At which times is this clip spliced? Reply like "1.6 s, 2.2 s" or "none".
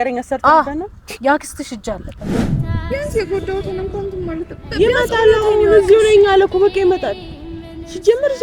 2.4 s